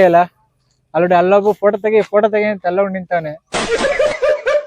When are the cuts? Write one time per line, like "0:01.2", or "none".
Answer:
0:03.6